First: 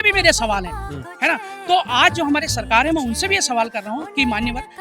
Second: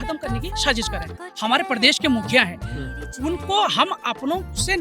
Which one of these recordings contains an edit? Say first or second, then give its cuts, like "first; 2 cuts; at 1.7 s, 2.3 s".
second; 1 cut; at 1.2 s